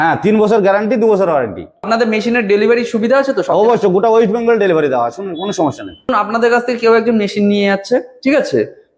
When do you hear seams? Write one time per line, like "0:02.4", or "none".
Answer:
0:01.9
0:06.1